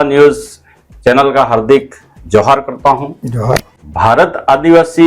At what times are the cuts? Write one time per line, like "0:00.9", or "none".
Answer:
0:03.7